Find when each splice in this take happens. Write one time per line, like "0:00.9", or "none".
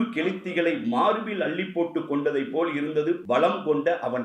0:03.2